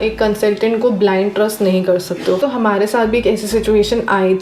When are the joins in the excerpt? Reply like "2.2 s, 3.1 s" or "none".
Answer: 2.4 s